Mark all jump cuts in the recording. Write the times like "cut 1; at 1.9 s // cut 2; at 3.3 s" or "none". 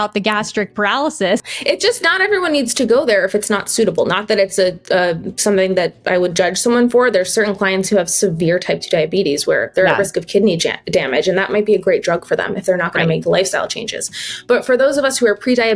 cut 1; at 1.4 s

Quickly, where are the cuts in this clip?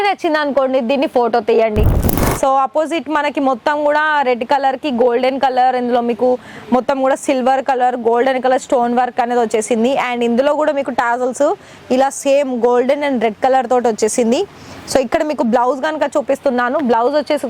cut 1; at 1.9 s

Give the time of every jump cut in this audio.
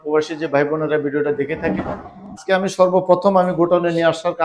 cut 1; at 2.4 s

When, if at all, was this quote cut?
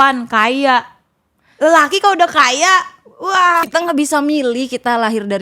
cut 1; at 3.7 s

